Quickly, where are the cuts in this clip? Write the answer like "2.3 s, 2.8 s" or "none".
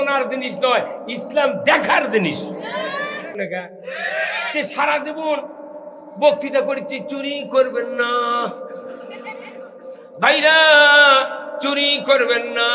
3.4 s